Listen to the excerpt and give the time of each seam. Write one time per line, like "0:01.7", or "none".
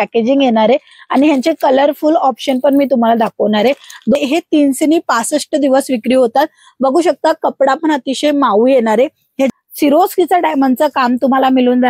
0:04.2
0:09.5